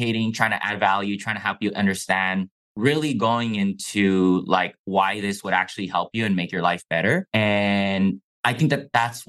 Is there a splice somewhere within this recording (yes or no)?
yes